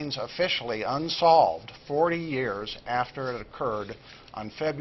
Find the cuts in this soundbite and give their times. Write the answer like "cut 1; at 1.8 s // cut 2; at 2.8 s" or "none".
cut 1; at 2.6 s